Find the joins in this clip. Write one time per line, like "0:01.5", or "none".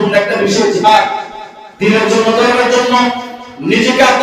none